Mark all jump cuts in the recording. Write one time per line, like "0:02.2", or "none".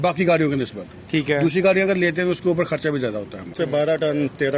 0:03.5